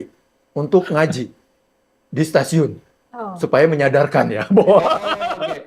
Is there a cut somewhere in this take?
no; 0 cuts

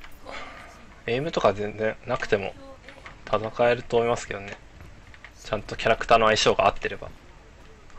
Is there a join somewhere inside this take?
no; 0 cuts

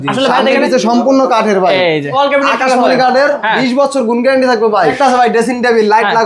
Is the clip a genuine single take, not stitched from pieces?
no; 2 cuts; at 2.1 s, 4.9 s

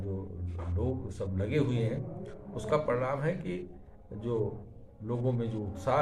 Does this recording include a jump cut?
no; 0 cuts

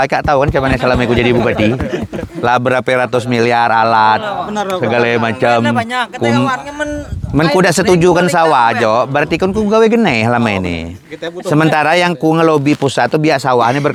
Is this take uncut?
yes; 0 cuts

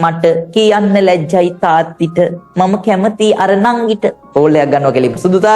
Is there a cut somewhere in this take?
yes; 1 cut; at 4.2 s

